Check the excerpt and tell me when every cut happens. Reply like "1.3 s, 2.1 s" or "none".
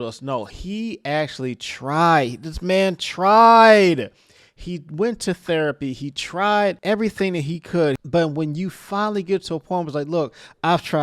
8.0 s